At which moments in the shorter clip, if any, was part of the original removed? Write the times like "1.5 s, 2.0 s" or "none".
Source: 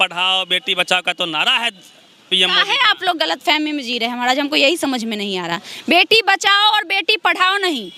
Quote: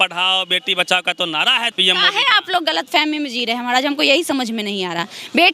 1.7 s